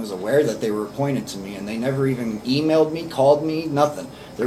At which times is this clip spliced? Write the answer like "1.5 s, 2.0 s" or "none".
none

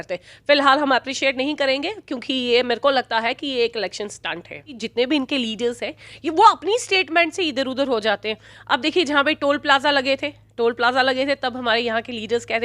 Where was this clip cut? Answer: 4.8 s

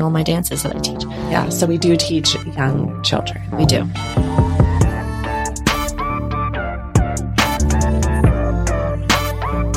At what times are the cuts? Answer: 3.9 s

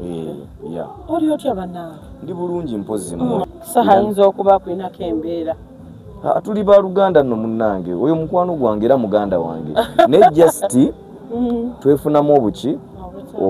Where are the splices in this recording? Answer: 3.4 s

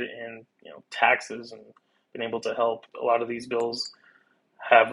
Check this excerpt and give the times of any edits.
2.9 s

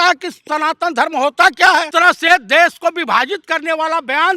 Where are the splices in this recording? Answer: 1.9 s

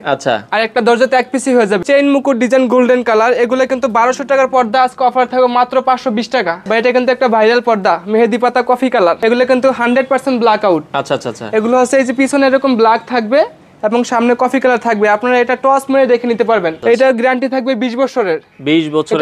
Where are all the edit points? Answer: 1.8 s, 6.6 s, 9.2 s, 16.7 s

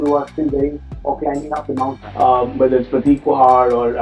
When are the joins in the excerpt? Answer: 2.0 s

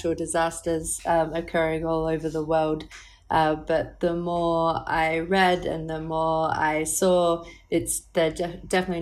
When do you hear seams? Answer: none

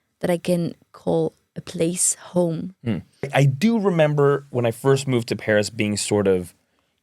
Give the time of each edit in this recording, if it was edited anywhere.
3.3 s

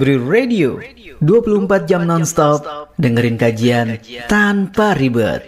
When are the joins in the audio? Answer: none

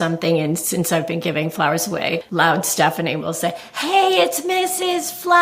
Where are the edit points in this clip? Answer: 2.3 s

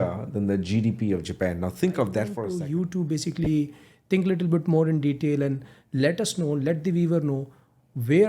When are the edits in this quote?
2.4 s

